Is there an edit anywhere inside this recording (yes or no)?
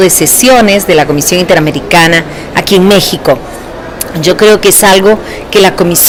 no